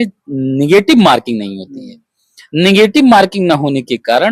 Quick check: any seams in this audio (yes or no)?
no